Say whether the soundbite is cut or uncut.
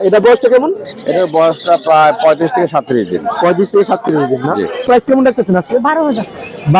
cut